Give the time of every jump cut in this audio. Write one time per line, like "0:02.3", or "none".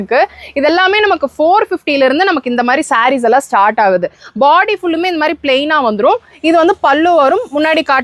none